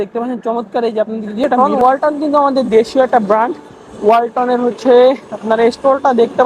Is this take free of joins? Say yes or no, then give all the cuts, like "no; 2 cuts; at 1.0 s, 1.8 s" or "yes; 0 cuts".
no; 1 cut; at 1.6 s